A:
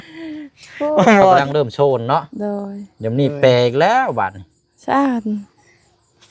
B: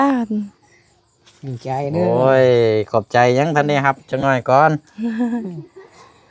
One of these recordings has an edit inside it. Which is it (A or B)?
A